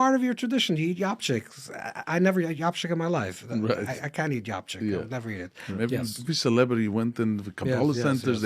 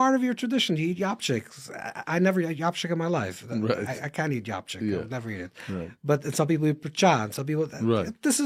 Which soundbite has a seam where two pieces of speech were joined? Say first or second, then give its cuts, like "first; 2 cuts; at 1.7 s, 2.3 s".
first; 1 cut; at 5.8 s